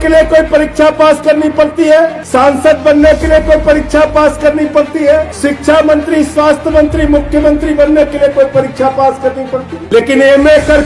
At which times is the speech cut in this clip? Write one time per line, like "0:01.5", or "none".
0:02.2
0:05.3
0:09.7

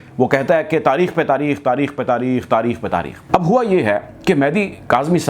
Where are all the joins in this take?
0:03.1

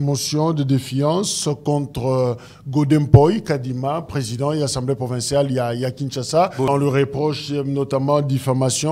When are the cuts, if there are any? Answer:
0:06.7

